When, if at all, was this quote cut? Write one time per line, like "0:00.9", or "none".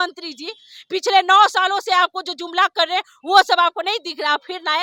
none